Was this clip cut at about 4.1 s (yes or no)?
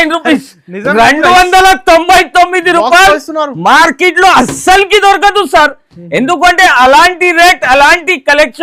no